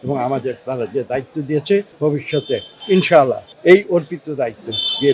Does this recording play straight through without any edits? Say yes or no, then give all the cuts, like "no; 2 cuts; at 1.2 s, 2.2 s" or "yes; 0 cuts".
no; 2 cuts; at 1.9 s, 3.5 s